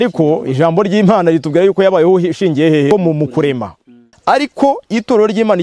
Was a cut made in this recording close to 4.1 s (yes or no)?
yes